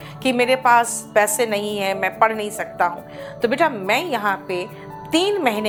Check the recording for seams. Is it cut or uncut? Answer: uncut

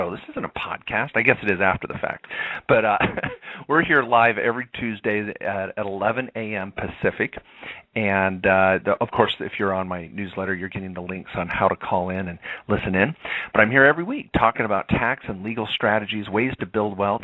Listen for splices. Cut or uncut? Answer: cut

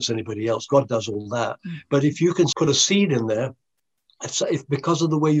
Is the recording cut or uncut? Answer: cut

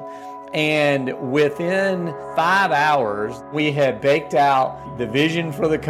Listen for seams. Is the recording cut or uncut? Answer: cut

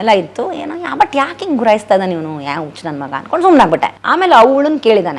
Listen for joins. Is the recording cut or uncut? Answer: cut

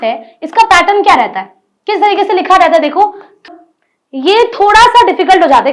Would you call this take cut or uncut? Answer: cut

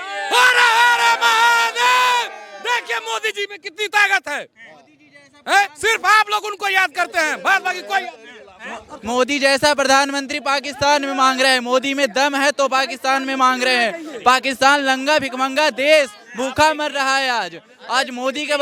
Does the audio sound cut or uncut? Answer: uncut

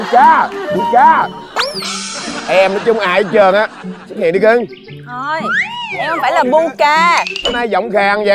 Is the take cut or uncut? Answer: uncut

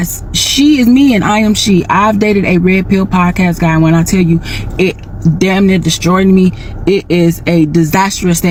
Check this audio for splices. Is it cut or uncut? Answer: uncut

